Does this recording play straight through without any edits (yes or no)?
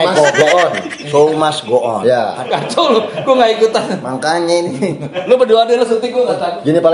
no